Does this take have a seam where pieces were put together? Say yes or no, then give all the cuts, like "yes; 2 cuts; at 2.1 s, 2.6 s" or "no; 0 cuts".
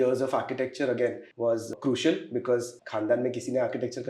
yes; 2 cuts; at 1.7 s, 2.8 s